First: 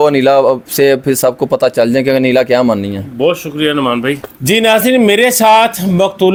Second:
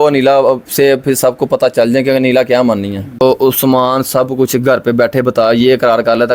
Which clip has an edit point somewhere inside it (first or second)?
second